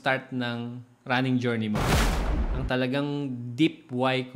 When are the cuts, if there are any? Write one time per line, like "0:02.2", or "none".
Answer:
0:02.1